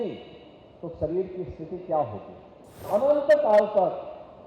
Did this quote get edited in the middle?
yes; 1 cut; at 2.8 s

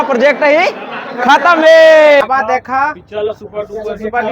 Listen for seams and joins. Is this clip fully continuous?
no; 1 cut; at 2.3 s

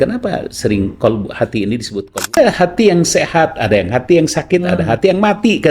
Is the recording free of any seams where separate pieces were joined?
no; 1 cut; at 2.3 s

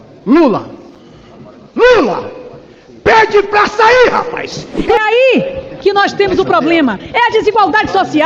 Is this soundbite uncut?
no; 1 cut; at 4.7 s

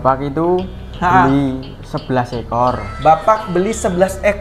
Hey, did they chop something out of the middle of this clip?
no; 0 cuts

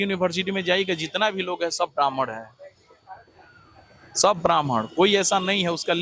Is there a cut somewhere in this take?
no; 0 cuts

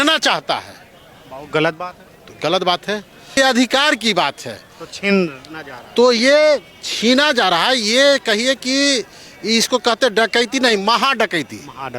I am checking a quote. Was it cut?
yes; 1 cut; at 3.4 s

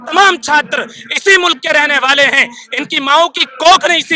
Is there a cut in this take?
no; 0 cuts

